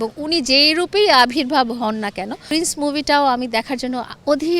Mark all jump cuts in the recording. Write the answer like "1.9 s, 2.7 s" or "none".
2.5 s